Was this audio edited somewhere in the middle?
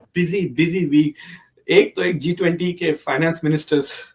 no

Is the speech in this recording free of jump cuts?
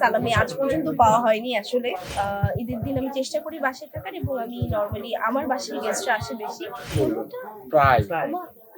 no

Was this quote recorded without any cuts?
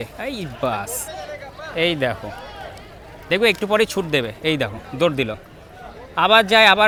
yes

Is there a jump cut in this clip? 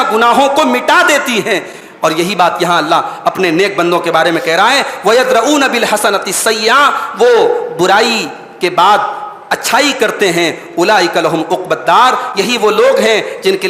no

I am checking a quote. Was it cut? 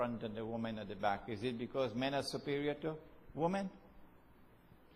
no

